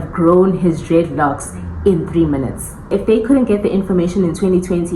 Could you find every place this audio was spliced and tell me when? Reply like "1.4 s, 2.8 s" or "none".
2.8 s